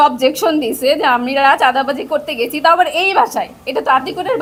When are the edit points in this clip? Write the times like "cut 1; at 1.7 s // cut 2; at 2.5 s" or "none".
none